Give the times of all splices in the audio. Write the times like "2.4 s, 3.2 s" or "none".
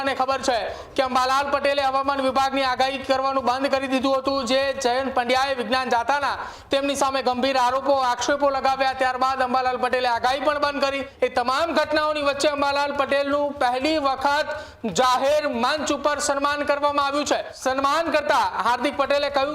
11.1 s, 17.5 s